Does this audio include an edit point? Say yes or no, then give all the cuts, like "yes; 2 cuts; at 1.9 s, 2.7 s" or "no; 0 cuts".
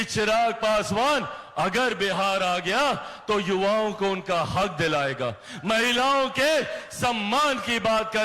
no; 0 cuts